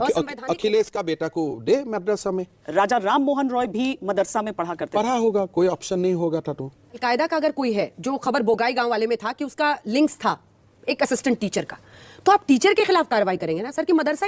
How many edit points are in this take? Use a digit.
2